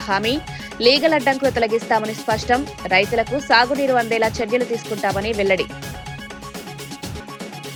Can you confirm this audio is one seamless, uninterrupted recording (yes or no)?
yes